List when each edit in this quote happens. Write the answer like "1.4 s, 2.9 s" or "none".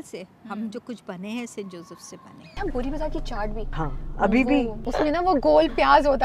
2.5 s, 3.7 s, 4.8 s